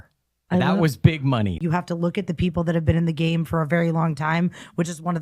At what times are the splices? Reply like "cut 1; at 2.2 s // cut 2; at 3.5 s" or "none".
cut 1; at 1.6 s